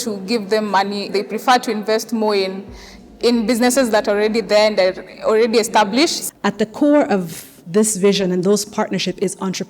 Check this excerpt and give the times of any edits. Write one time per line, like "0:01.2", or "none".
0:01.1
0:06.2